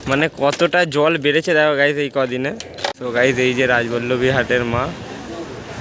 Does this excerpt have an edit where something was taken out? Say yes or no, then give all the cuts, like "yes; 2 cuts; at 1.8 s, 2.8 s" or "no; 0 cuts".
yes; 1 cut; at 2.9 s